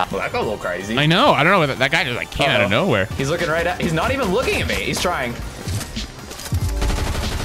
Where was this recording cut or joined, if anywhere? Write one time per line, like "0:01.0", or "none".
0:03.1